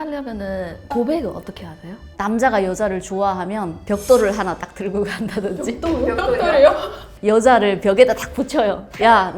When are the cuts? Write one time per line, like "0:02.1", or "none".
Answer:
0:02.1